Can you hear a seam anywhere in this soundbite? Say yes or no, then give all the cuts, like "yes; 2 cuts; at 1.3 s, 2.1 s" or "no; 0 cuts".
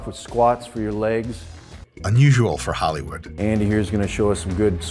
yes; 1 cut; at 3.2 s